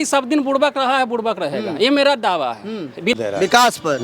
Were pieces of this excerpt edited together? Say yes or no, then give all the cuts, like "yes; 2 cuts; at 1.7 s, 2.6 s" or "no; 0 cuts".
yes; 1 cut; at 3.1 s